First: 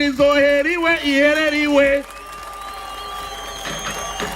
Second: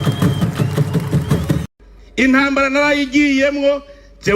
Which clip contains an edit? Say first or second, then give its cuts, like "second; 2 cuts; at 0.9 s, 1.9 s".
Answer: second; 1 cut; at 1.6 s